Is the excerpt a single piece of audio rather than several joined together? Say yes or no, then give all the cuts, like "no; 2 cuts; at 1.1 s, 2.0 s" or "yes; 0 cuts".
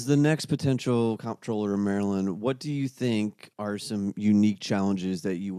yes; 0 cuts